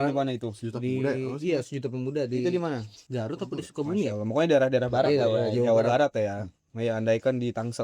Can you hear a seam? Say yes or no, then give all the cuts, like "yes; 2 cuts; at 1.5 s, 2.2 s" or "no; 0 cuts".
yes; 1 cut; at 3.0 s